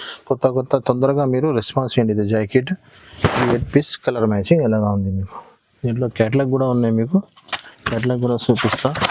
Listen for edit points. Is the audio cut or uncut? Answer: uncut